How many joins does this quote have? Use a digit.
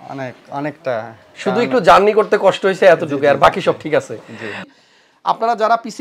1